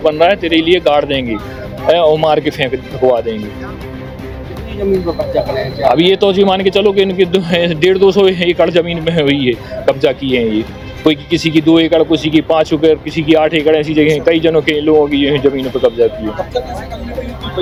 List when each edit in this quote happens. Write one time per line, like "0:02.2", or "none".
none

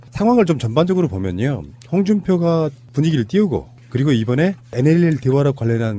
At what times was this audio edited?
none

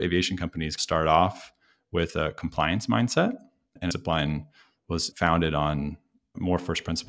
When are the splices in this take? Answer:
0:03.9

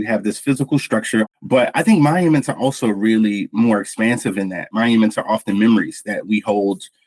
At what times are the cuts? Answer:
0:01.3
0:04.7

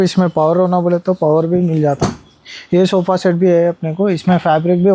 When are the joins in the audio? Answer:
none

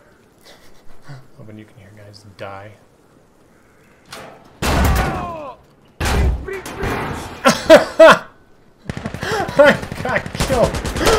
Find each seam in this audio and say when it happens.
none

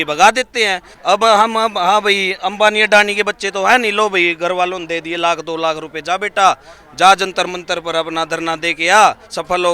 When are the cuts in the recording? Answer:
0:00.9

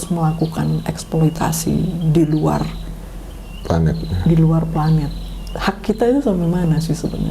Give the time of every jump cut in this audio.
none

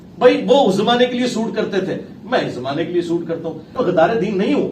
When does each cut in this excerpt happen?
0:03.7

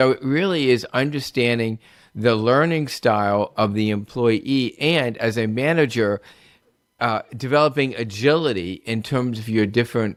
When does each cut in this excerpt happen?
none

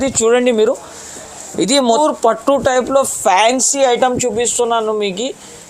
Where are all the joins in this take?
0:01.9

